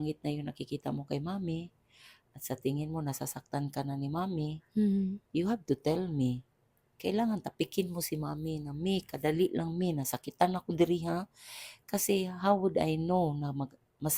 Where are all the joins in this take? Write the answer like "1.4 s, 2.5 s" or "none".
none